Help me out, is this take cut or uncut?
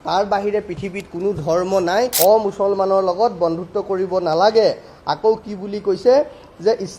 cut